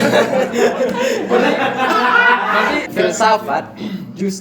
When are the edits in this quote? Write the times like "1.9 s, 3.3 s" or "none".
2.9 s